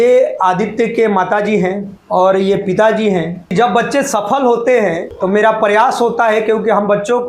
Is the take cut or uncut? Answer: cut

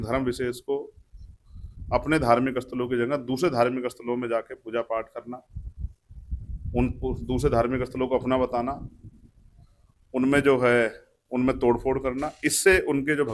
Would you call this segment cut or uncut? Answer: uncut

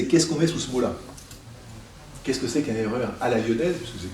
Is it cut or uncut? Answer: uncut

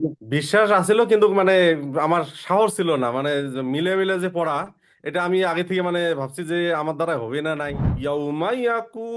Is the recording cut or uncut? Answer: cut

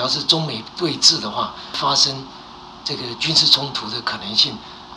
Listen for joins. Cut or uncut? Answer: uncut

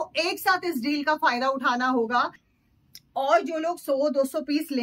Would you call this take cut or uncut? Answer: cut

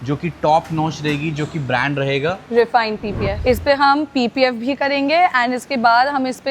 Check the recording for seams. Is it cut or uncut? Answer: cut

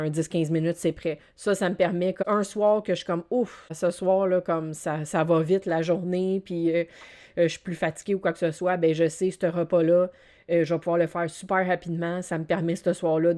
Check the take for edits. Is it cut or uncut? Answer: cut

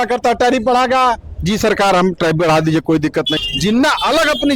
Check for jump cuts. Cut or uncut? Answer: cut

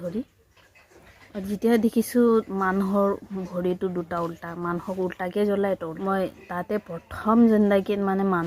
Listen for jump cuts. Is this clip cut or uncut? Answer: cut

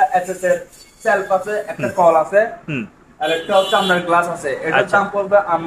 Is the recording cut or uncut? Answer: uncut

